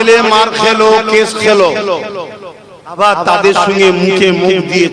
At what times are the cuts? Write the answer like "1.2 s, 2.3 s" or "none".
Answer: 3.0 s